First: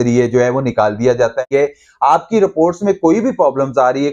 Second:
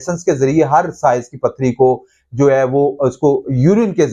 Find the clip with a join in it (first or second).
first